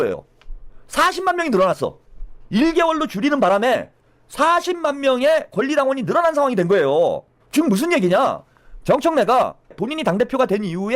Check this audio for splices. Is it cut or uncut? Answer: cut